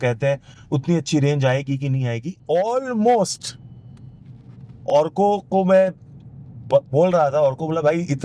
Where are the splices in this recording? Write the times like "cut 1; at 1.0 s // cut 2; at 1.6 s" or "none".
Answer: cut 1; at 2.3 s